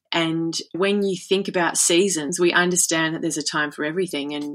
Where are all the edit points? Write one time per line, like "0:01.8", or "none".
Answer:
0:00.8
0:02.3